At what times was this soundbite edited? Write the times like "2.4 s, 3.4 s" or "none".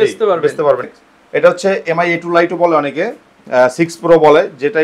0.9 s